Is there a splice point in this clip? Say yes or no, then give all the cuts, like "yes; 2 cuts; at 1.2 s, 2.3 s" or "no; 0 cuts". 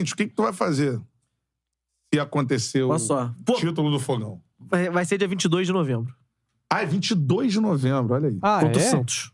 no; 0 cuts